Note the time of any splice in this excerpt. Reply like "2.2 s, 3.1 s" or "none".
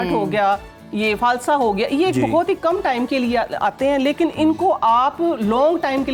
none